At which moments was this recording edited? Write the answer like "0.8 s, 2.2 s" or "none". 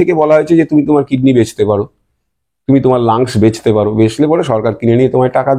none

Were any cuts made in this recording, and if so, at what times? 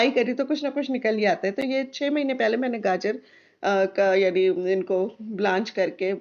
none

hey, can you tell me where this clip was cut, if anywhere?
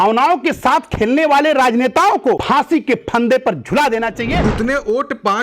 2.4 s, 4.4 s

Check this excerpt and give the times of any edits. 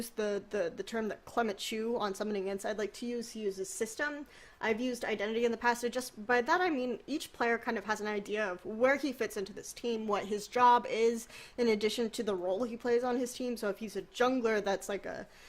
6.4 s

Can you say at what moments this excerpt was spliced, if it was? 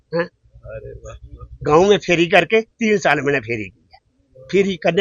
none

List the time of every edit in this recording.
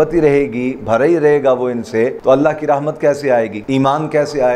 2.2 s, 3.6 s

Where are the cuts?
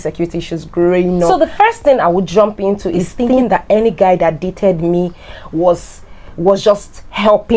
1.3 s, 3.4 s

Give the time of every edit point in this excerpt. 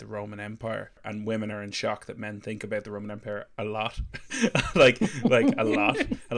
1.0 s

